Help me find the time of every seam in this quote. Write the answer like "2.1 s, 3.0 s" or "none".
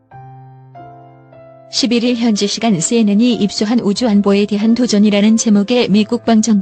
1.8 s